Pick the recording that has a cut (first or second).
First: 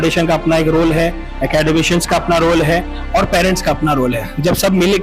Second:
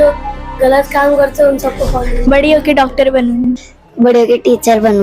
second